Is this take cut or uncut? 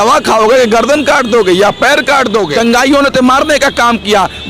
cut